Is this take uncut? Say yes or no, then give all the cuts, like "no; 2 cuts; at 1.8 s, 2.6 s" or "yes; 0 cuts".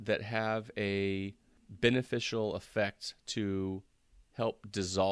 yes; 0 cuts